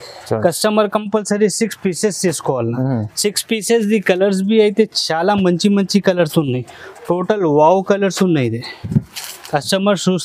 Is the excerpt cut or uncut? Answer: uncut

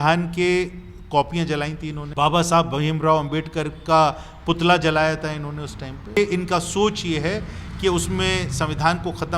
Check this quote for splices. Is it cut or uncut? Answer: cut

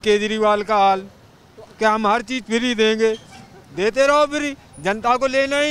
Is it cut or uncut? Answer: uncut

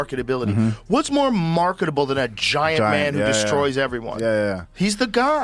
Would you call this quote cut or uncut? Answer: uncut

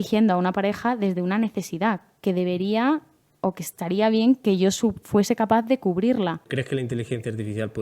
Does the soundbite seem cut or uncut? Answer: cut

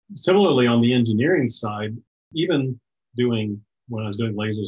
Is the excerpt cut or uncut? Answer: cut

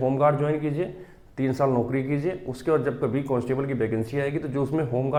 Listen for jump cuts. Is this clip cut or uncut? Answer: uncut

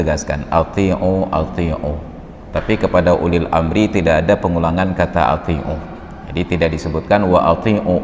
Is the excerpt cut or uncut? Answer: uncut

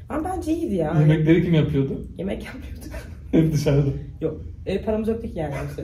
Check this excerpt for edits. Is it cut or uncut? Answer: uncut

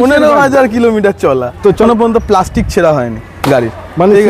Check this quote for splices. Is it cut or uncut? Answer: cut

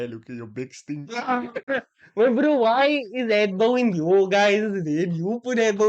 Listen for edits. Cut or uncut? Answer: cut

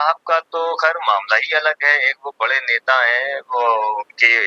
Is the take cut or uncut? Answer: uncut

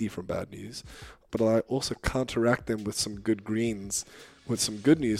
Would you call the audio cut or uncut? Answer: cut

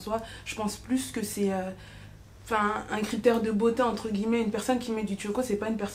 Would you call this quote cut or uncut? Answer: uncut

